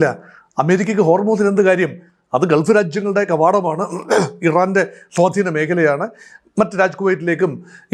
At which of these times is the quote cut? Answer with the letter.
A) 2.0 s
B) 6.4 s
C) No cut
C